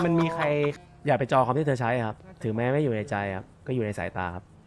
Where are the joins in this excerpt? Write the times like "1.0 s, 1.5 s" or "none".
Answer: 0.8 s, 2.3 s, 3.5 s